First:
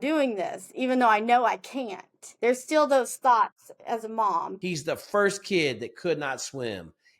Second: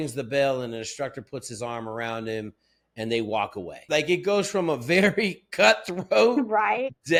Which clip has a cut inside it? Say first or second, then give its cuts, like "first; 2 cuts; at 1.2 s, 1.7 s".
first; 1 cut; at 4.5 s